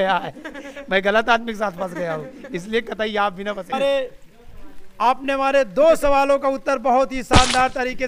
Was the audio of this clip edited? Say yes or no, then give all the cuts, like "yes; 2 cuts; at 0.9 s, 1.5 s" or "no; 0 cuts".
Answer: yes; 1 cut; at 3.7 s